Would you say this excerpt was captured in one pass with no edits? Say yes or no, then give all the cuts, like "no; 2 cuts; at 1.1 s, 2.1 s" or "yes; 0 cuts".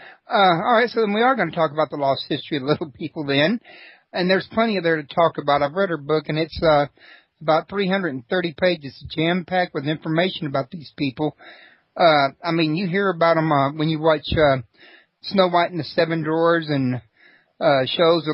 yes; 0 cuts